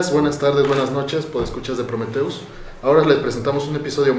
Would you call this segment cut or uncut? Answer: uncut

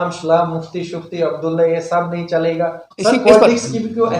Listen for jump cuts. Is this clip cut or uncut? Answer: cut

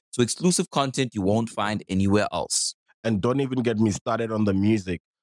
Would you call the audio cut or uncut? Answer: uncut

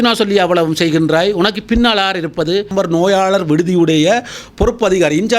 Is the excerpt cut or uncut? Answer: cut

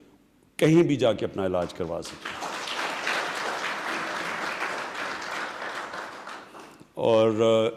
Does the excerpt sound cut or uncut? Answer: uncut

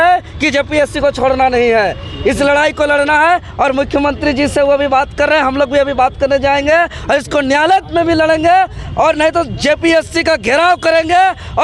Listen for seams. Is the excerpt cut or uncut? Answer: uncut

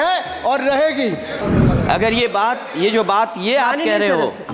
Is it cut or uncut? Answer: cut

